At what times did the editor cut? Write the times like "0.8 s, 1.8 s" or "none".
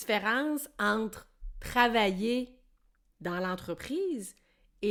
none